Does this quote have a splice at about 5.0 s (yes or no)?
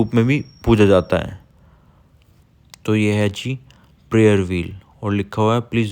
no